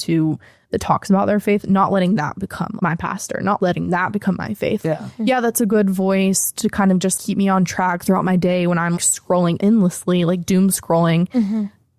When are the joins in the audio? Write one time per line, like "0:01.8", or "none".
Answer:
0:02.7
0:03.6
0:04.8
0:07.1
0:09.3